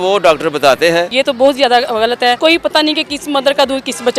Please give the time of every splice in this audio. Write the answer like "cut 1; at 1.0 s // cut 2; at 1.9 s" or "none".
cut 1; at 1.1 s // cut 2; at 2.4 s